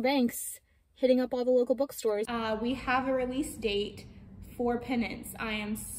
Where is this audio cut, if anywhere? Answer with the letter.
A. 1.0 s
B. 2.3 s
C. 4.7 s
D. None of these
B